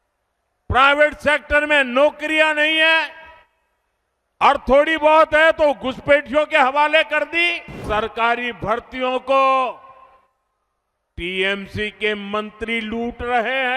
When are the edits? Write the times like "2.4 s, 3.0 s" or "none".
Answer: 7.8 s